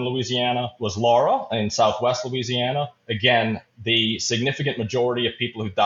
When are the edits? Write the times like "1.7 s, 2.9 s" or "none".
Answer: none